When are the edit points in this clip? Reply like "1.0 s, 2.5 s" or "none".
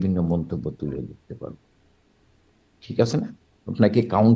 none